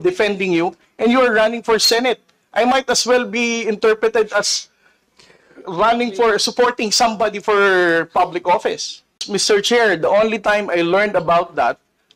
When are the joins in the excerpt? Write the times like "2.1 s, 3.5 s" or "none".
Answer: 9.2 s

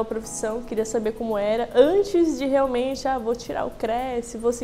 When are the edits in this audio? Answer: none

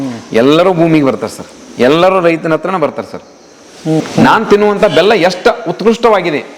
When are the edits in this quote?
4.0 s

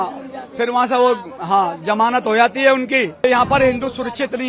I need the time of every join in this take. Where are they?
3.2 s

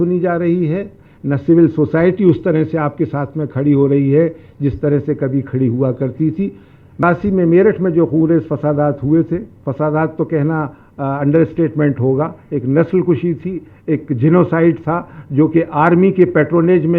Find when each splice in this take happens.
7.0 s

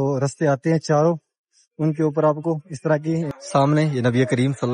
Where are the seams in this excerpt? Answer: 3.3 s

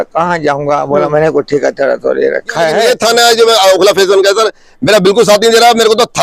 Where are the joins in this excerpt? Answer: 2.8 s

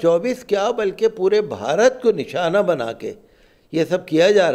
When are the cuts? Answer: none

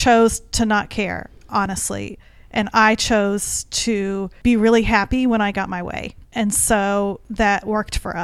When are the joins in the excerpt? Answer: 4.3 s, 7.2 s

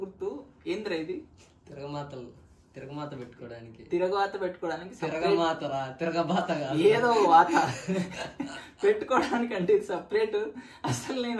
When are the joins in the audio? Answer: none

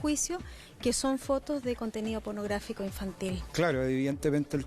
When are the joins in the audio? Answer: 3.4 s

